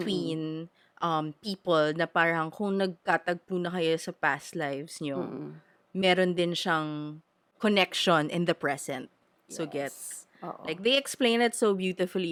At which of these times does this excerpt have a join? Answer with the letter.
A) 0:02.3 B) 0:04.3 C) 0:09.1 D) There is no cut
D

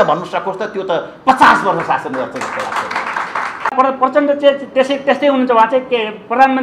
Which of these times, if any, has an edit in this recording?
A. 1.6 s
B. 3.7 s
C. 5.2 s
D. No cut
B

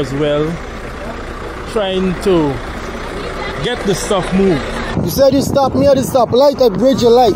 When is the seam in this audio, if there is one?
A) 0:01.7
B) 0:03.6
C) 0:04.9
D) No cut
C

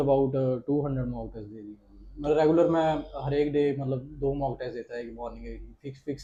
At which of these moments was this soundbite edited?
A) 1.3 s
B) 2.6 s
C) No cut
C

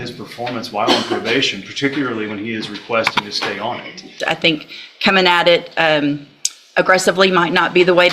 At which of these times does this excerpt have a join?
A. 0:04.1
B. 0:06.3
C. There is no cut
A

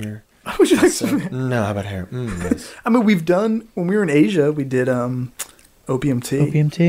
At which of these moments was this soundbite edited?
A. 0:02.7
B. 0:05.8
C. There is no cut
C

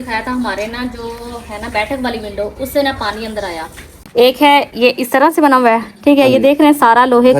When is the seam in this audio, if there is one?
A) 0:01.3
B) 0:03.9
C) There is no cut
B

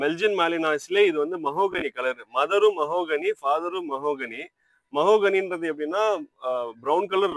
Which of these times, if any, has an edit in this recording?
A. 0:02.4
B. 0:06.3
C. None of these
C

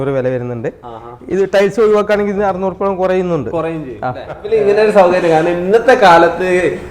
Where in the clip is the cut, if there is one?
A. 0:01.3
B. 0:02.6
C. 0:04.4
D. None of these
C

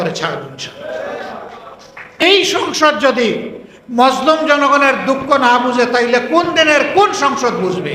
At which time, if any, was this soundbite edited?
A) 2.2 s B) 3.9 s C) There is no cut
A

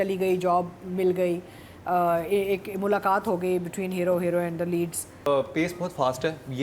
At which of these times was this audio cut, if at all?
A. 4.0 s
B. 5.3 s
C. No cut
B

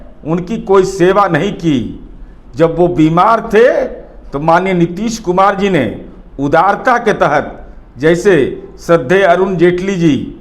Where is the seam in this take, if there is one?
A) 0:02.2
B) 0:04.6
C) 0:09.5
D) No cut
D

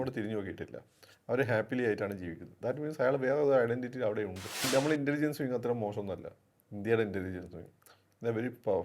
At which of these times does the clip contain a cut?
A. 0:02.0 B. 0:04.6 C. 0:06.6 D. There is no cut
B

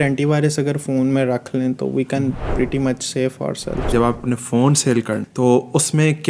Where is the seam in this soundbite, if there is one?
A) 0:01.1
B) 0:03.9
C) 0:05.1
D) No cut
B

